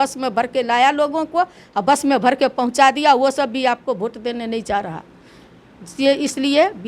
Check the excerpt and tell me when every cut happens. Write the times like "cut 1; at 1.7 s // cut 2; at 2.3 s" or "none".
none